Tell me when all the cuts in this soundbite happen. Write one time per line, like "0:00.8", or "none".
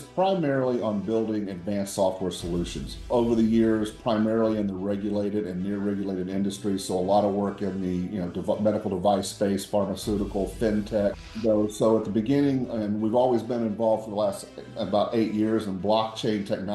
0:03.1
0:11.2